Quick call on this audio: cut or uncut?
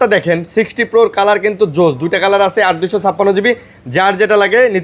uncut